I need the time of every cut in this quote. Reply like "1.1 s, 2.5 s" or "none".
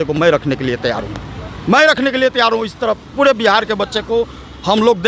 none